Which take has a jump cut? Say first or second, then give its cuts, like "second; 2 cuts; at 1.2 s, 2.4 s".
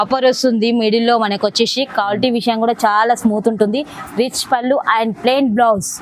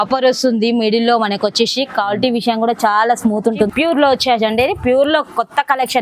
second; 1 cut; at 3.7 s